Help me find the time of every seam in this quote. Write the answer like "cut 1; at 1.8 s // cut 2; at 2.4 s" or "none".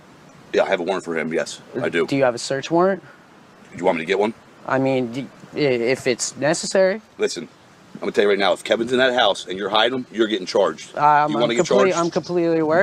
none